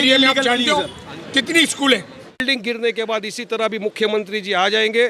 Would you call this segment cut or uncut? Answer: cut